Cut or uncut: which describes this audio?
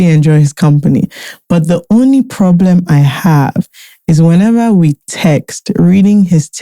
uncut